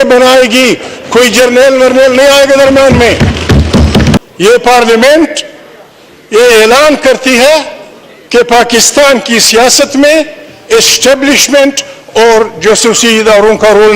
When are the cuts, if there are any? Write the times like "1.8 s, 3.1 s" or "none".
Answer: 4.2 s